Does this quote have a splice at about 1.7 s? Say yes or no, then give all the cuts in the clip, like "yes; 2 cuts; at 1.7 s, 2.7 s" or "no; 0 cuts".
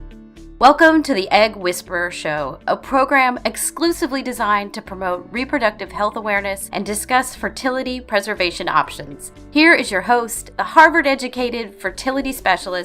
no; 1 cut; at 3.0 s